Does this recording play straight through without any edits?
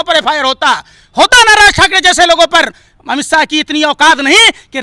yes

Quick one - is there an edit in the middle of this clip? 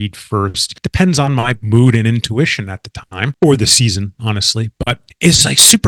no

